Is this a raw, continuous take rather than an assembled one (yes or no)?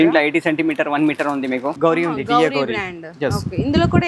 no